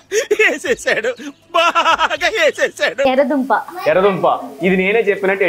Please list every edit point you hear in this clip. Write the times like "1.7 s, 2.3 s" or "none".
3.1 s